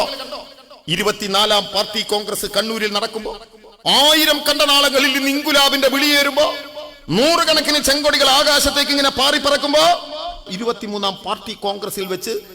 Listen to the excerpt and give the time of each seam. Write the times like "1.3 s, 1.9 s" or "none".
10.5 s